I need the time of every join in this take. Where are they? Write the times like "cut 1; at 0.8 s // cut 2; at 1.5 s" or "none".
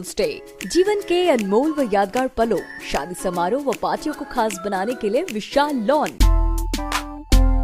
cut 1; at 6.2 s